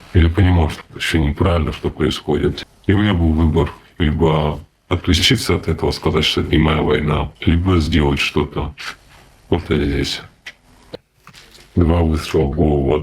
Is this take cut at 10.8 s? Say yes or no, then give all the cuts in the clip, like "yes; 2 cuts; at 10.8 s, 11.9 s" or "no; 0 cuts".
yes; 3 cuts; at 2.6 s, 7.3 s, 10.8 s